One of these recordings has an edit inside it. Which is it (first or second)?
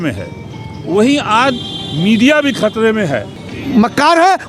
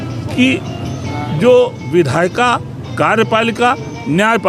first